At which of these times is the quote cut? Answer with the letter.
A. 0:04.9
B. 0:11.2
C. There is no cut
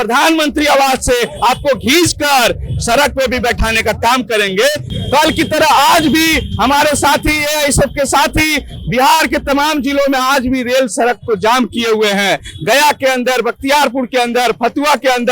A